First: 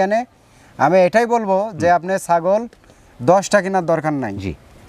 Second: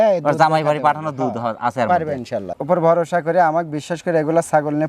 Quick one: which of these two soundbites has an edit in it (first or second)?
second